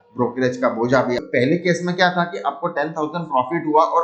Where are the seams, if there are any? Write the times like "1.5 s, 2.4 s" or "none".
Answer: 1.2 s